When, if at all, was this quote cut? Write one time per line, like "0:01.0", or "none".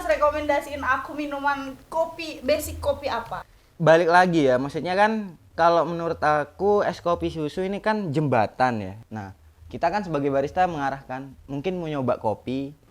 0:03.4
0:09.0